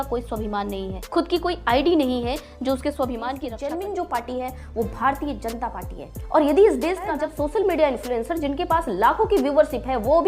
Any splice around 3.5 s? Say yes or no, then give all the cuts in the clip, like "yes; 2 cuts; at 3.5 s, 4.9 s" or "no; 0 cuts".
yes; 2 cuts; at 3.5 s, 7.1 s